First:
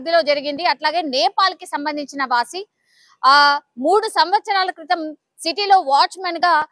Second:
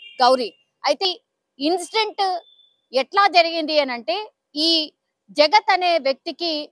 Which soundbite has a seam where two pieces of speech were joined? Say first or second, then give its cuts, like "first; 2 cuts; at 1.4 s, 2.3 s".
second; 1 cut; at 1.1 s